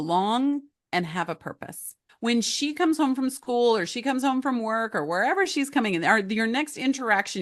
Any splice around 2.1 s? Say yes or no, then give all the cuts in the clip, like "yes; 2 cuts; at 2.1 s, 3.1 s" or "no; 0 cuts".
yes; 1 cut; at 2.1 s